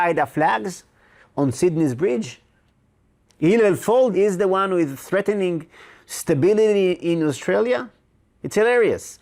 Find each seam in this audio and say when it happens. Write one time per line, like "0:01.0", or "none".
0:04.1